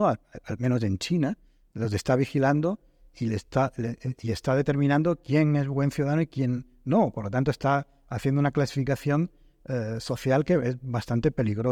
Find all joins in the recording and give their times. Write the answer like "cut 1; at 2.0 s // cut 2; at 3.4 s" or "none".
none